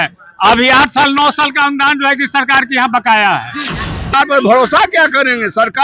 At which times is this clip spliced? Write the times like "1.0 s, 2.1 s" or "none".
4.1 s